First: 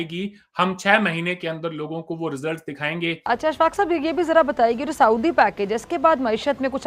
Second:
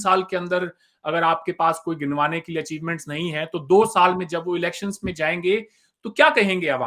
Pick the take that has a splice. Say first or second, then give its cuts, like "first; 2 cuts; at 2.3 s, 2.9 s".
first; 1 cut; at 3.2 s